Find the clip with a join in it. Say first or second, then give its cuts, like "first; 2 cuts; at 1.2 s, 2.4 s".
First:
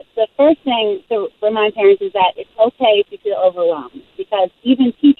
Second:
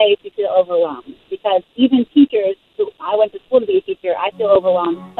first; 1 cut; at 1.0 s